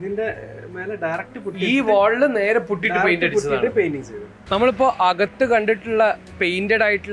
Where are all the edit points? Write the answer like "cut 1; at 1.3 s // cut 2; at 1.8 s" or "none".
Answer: cut 1; at 4.4 s